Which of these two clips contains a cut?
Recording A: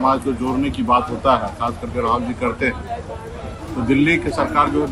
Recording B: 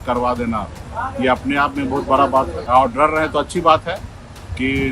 B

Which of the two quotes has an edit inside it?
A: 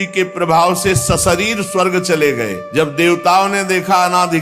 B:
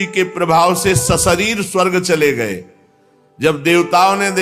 A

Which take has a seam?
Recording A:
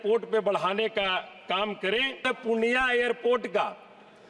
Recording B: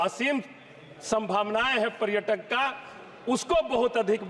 A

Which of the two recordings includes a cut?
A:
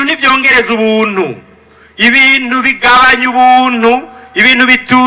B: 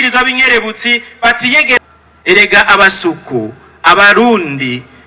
B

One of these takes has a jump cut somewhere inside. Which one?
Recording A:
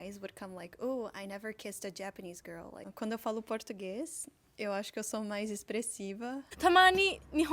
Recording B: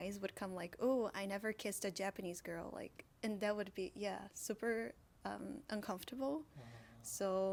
A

